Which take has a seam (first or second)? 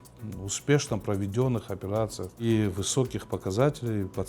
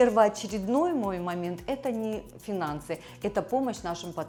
first